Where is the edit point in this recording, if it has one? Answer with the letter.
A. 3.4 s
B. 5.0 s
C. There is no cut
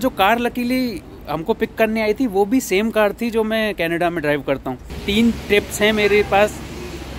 B